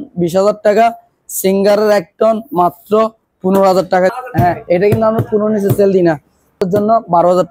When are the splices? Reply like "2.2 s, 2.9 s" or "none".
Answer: 4.1 s, 6.6 s